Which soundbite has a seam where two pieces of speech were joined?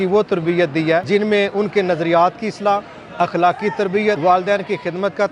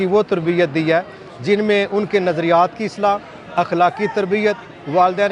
first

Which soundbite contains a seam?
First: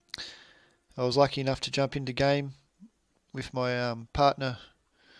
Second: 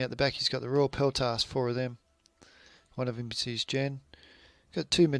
first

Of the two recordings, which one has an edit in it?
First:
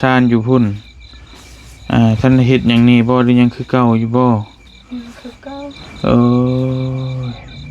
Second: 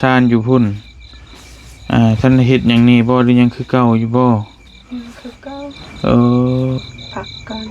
second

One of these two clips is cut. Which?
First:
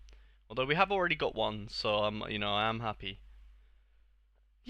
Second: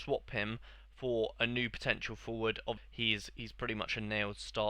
second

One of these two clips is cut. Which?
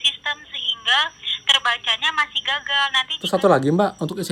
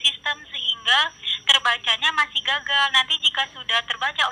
first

